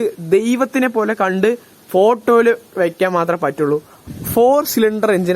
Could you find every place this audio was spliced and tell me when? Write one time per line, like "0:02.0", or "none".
0:03.9

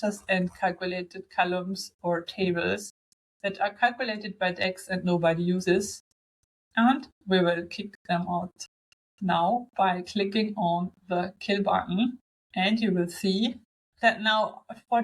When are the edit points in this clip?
none

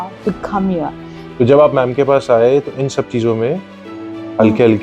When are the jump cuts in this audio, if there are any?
0:01.1

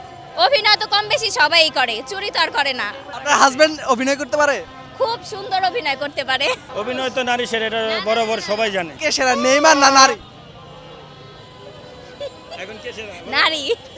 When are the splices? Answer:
0:03.1
0:06.7
0:08.9

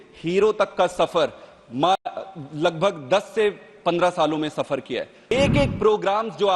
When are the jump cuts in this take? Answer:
0:05.3

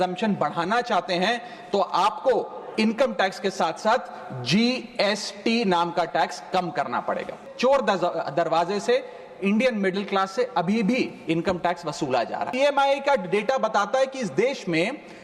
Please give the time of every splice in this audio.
0:07.4
0:12.5

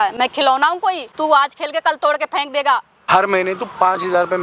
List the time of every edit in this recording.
0:01.1
0:03.0

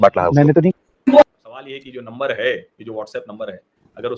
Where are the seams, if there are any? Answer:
0:01.6

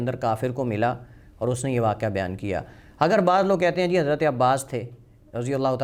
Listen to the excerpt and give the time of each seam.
none

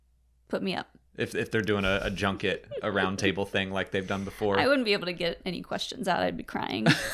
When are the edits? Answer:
0:01.0

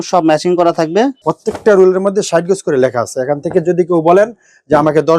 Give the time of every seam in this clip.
0:01.2

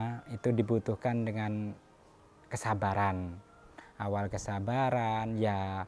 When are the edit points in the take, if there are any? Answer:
none

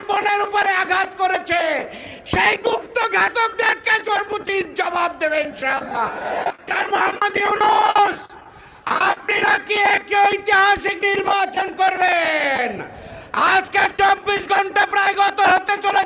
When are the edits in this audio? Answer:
0:06.5

